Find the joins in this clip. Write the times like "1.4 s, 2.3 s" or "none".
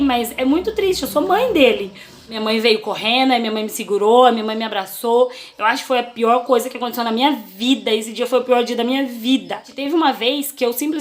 2.4 s, 9.8 s